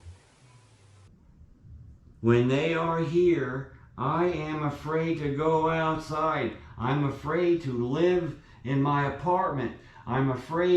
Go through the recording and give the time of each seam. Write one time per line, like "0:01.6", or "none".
0:01.1